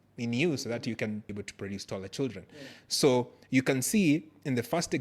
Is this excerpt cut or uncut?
cut